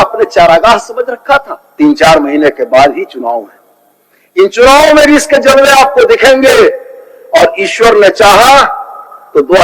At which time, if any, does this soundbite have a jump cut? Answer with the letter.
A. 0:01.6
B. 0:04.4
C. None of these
A